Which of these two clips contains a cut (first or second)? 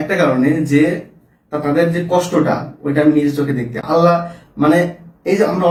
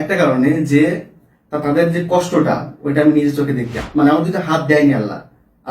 second